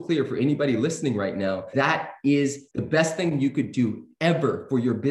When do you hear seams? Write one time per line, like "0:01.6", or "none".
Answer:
0:01.7
0:02.7